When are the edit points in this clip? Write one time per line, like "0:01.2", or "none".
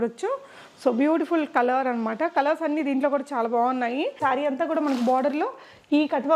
0:04.2